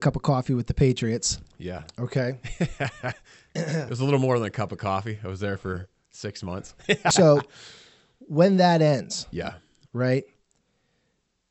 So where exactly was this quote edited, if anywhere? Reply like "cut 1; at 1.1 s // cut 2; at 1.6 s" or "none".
cut 1; at 7.1 s